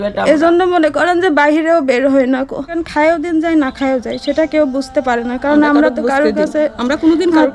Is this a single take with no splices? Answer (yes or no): no